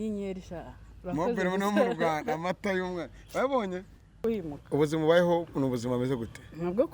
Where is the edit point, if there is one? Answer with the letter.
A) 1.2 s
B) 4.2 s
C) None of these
B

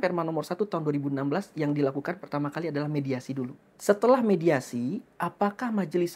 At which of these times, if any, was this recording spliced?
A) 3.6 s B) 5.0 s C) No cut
A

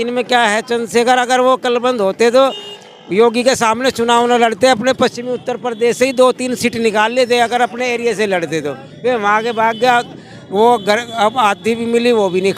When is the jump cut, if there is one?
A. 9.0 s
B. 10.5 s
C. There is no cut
C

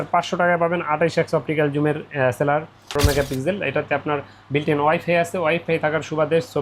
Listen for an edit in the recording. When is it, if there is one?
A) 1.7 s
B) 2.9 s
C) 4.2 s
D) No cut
B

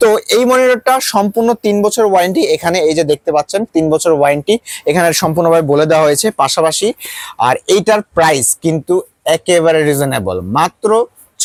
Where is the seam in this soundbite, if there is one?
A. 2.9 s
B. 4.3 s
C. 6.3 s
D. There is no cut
D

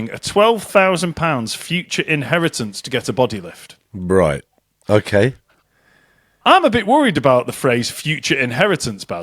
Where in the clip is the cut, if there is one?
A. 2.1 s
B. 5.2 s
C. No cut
C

